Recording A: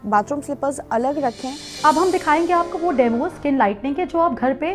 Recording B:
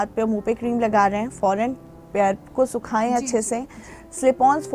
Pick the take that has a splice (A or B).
A